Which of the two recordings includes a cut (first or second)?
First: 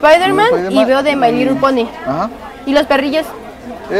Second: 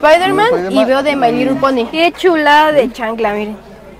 second